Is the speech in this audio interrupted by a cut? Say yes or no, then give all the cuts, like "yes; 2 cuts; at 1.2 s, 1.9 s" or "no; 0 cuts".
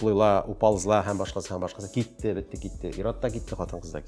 no; 0 cuts